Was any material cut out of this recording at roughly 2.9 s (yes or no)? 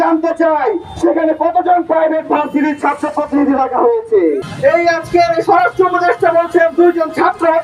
no